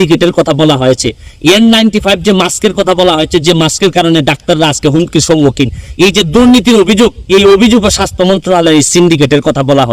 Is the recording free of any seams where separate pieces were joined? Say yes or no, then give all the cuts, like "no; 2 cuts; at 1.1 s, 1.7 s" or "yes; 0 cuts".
yes; 0 cuts